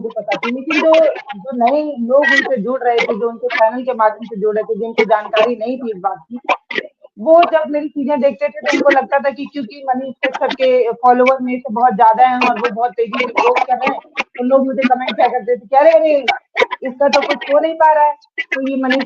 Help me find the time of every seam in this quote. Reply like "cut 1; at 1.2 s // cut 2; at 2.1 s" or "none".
none